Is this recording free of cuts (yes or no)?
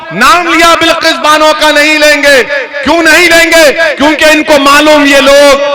yes